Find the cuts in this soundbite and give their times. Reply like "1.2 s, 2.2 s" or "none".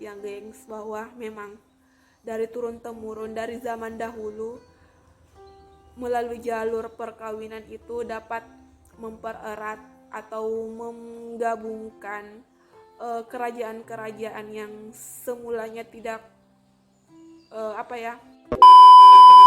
18.4 s